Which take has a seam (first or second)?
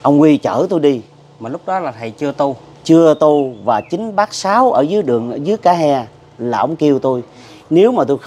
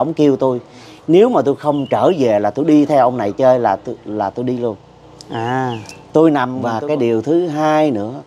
second